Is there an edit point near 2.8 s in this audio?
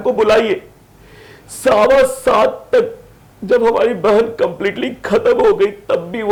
no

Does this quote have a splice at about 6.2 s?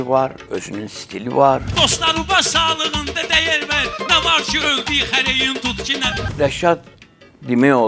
yes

